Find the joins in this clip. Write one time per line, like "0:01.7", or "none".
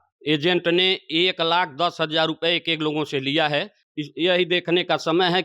0:03.8